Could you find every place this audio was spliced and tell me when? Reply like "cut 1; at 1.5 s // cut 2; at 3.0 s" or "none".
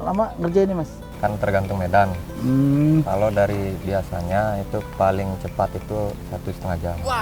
cut 1; at 1.0 s

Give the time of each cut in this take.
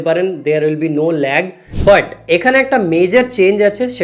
cut 1; at 1.6 s

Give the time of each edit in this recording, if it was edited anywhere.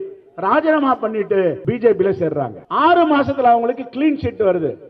cut 1; at 1.6 s // cut 2; at 2.6 s

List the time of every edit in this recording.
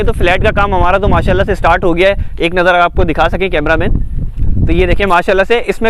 none

